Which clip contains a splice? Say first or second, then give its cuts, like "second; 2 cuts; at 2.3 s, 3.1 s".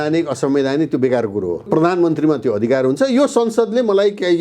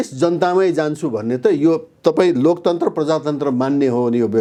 first; 1 cut; at 1.7 s